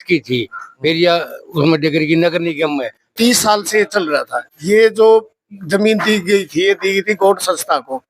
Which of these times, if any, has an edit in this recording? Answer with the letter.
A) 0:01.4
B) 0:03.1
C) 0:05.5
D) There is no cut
B